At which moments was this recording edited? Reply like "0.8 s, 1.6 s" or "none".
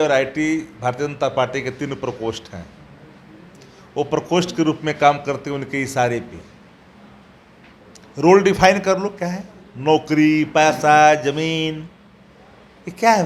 none